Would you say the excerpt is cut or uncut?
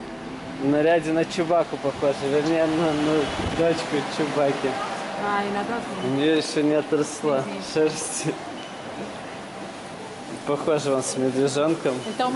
uncut